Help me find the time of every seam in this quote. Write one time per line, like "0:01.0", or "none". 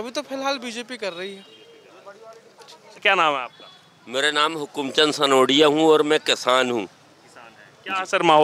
none